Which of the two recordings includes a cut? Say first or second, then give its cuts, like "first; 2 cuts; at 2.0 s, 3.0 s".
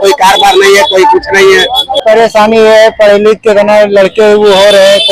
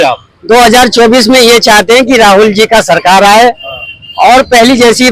first; 1 cut; at 2.0 s